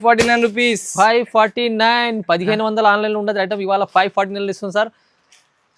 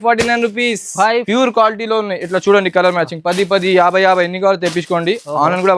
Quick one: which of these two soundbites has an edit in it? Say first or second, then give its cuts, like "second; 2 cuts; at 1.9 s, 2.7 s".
second; 1 cut; at 1.2 s